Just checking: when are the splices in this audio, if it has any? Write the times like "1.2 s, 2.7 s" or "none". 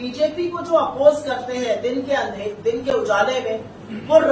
none